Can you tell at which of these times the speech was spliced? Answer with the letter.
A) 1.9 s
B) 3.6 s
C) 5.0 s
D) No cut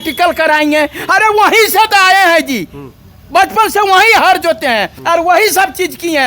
C